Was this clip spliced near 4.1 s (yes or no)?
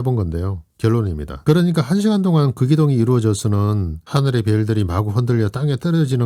no